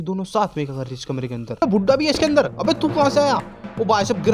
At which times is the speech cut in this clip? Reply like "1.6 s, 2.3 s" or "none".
1.6 s